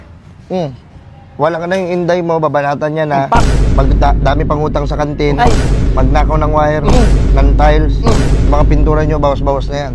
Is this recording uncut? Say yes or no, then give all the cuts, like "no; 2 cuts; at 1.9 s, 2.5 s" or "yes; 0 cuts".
yes; 0 cuts